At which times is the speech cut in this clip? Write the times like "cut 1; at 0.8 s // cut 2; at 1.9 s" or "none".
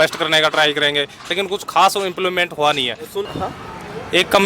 cut 1; at 3.3 s

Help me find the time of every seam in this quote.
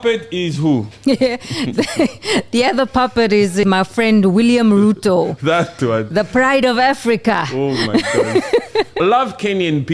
cut 1; at 0.9 s // cut 2; at 3.6 s // cut 3; at 9.0 s

